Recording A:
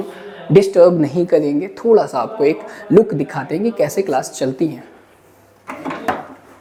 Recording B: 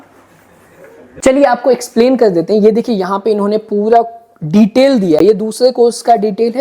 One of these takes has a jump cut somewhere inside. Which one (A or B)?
B